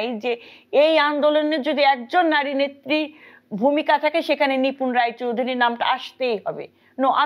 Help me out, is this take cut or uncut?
uncut